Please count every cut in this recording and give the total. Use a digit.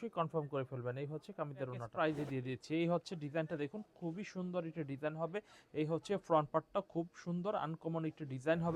1